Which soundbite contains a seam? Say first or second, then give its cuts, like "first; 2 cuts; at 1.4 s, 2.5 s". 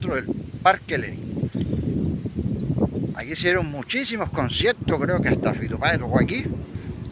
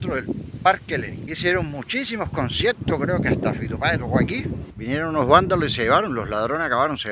second; 2 cuts; at 1.2 s, 4.6 s